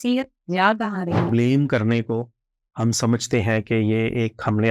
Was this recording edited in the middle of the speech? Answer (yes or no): yes